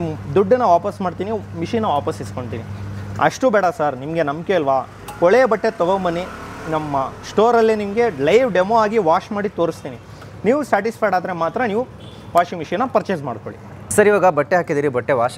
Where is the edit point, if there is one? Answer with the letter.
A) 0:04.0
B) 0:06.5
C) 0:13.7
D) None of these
D